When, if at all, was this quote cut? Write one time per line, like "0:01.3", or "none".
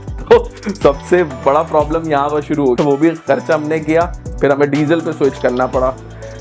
0:02.8
0:04.2